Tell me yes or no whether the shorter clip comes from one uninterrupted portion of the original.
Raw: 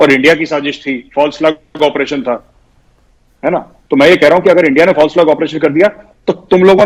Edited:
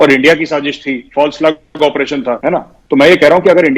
no